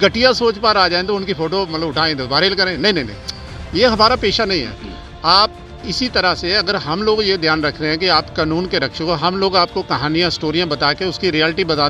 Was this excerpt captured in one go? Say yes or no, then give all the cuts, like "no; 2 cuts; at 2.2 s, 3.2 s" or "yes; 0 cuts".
yes; 0 cuts